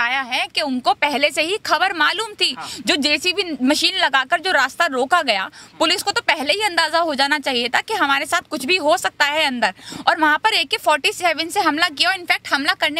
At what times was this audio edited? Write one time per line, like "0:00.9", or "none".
none